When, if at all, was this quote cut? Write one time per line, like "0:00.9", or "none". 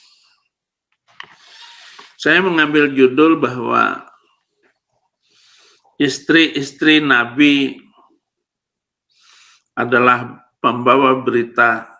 none

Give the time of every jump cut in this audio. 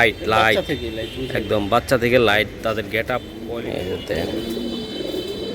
0:03.3

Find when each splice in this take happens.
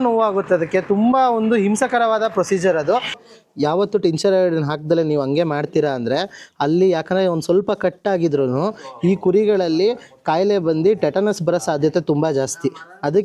0:03.2

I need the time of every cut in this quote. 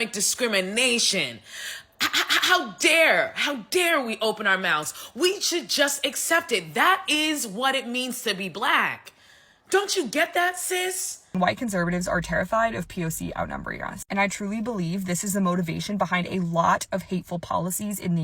0:11.3

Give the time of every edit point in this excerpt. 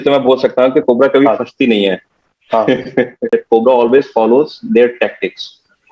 0:03.2

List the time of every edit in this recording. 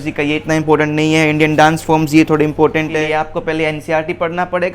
0:02.9

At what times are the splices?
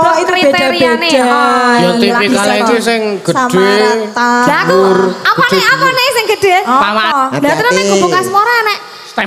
0:06.7

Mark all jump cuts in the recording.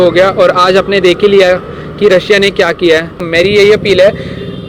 0:03.3

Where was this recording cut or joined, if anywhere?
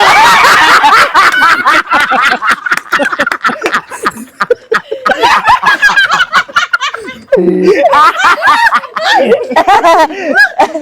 0:00.9

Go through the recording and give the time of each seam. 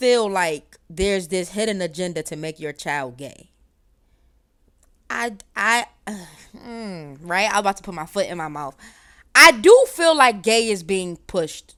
none

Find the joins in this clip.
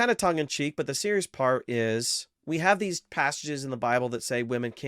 0:02.3

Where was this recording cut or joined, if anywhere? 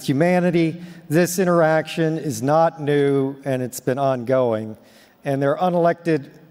none

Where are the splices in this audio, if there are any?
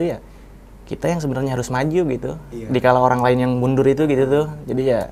none

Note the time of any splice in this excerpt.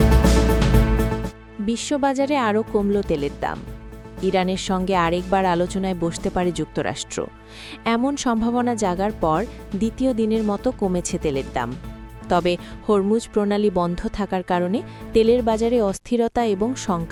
none

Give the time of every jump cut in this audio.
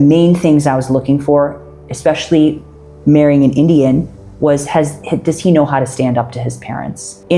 none

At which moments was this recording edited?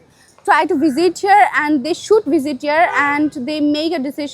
0:02.3

